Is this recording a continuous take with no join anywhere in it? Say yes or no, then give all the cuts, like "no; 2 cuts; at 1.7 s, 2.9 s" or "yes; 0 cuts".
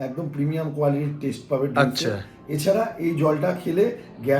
yes; 0 cuts